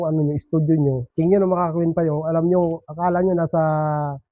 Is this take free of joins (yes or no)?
no